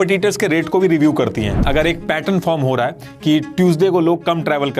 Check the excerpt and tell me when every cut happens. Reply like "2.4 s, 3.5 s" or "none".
1.6 s